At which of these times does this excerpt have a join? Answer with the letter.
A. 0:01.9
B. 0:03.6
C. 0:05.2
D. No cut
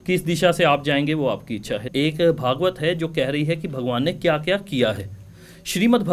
A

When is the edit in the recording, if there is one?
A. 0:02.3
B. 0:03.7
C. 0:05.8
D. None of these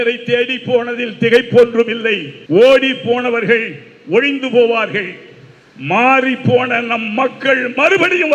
A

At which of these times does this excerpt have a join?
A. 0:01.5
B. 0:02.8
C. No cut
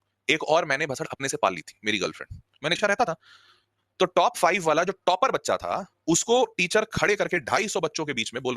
B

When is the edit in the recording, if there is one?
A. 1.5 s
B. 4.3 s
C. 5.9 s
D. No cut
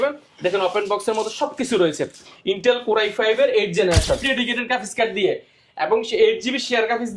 B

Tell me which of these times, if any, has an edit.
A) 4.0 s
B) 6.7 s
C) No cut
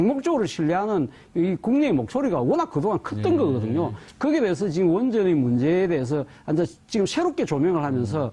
B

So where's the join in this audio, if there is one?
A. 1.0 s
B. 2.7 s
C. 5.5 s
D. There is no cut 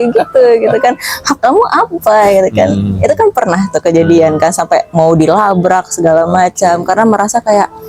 D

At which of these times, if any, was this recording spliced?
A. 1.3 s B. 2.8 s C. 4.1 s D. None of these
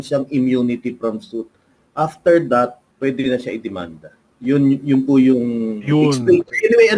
B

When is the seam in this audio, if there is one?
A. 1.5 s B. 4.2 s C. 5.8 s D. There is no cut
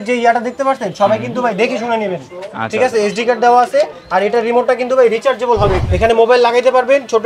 C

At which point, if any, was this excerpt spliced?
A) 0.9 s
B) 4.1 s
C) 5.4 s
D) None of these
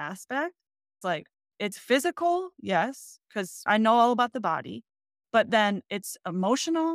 A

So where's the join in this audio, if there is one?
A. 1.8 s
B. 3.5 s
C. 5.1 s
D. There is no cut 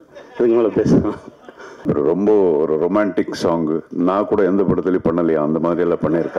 A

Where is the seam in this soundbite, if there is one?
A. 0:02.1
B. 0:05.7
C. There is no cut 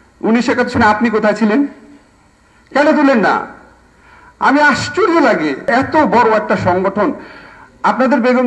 B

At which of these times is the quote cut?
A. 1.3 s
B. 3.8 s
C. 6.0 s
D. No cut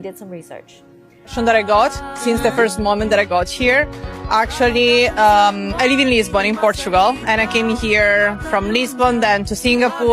A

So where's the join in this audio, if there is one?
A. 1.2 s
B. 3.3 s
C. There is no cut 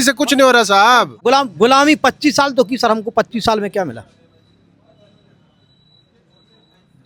A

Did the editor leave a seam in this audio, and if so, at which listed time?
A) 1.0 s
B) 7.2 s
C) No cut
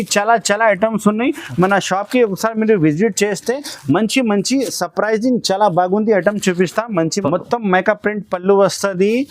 B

